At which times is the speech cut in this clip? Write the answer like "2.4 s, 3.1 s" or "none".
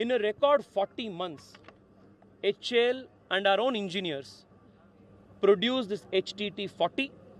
none